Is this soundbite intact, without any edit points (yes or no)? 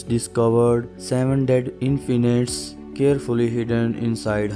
yes